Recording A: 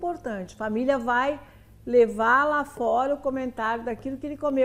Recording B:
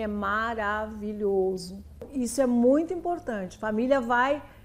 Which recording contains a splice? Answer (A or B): B